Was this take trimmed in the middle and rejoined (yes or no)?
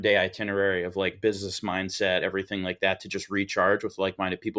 no